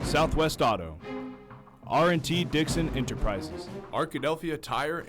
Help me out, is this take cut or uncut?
cut